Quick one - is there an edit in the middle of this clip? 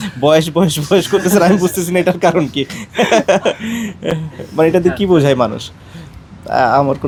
no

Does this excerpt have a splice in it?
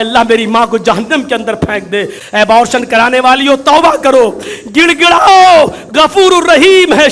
yes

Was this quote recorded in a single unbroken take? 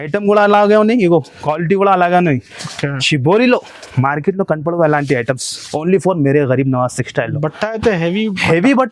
yes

